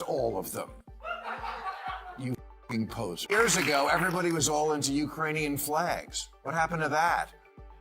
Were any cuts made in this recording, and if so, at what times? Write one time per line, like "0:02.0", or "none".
0:03.3